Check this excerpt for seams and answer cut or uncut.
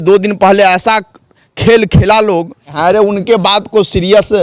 cut